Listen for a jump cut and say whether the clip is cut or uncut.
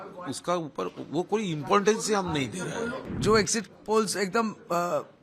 cut